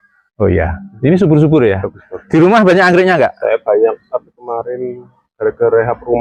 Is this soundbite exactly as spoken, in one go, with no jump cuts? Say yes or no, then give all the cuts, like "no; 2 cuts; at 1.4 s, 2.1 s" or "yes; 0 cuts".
yes; 0 cuts